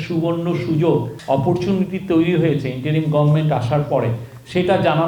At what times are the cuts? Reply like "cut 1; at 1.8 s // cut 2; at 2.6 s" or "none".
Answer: cut 1; at 1.1 s